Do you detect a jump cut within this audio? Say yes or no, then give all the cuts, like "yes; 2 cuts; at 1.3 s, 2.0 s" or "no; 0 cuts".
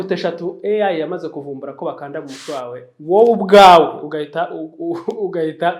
no; 0 cuts